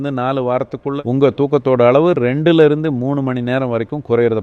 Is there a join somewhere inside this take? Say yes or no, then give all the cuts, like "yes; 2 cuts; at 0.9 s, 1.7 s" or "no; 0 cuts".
yes; 1 cut; at 1.0 s